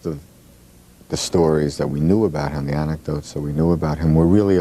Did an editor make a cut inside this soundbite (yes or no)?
yes